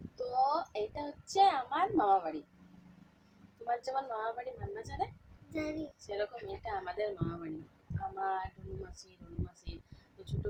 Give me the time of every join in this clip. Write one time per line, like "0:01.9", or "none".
none

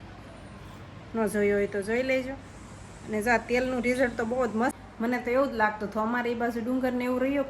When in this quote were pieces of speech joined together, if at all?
0:04.8

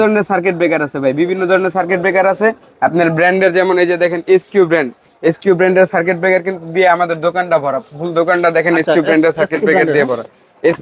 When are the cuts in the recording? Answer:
none

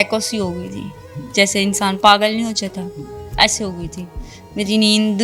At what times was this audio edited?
none

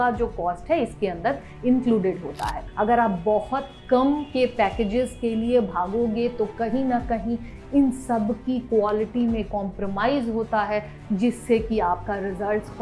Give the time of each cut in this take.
0:02.6

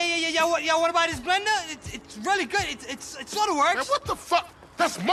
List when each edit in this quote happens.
none

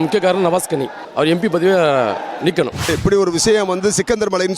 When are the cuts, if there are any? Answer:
0:01.0
0:02.9

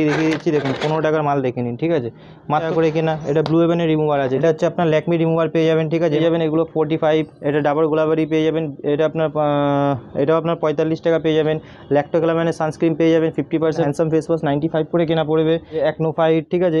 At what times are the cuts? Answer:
0:02.7
0:04.4
0:06.2
0:13.9
0:15.8

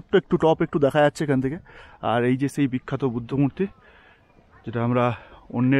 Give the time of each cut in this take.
none

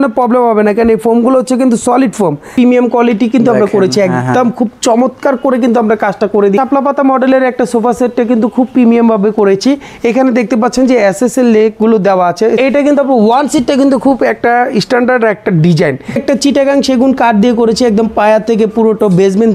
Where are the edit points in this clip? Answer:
0:02.4
0:06.6
0:12.6
0:16.2

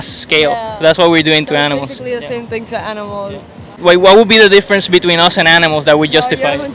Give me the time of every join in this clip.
0:03.8

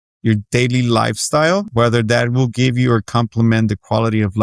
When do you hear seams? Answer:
0:01.7

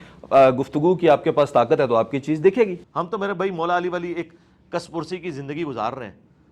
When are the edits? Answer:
0:02.8

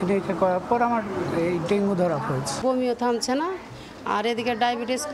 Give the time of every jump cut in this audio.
0:02.5

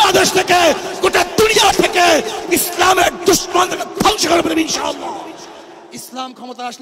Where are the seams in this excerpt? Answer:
0:05.9

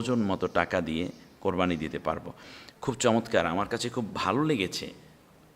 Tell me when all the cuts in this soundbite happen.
none

